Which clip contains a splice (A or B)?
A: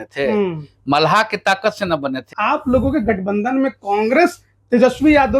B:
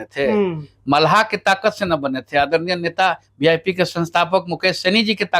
A